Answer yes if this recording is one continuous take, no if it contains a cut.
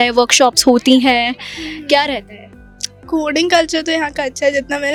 yes